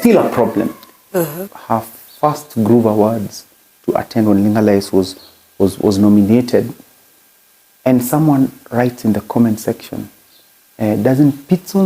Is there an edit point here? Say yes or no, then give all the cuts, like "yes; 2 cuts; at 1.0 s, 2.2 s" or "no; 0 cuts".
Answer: yes; 1 cut; at 1.5 s